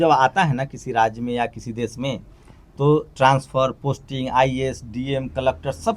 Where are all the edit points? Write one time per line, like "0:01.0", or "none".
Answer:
none